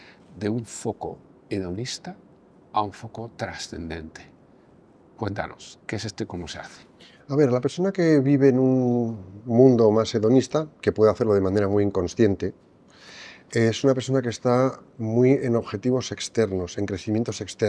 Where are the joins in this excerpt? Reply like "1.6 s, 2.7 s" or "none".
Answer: none